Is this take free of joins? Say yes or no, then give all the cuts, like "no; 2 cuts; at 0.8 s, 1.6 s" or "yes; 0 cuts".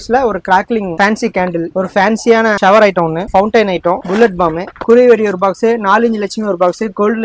yes; 0 cuts